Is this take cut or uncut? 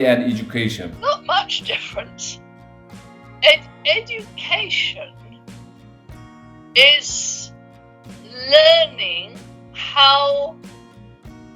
cut